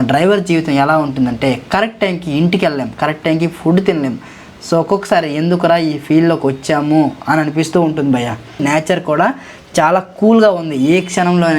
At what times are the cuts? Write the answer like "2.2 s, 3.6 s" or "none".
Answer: 8.6 s